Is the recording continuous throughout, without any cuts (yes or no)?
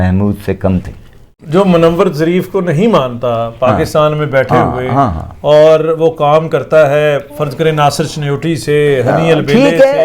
no